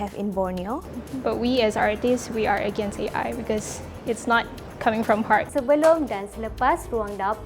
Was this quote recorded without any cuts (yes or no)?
no